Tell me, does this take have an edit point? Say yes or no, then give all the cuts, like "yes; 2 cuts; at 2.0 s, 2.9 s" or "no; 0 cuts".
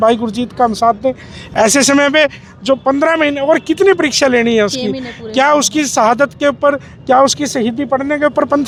no; 0 cuts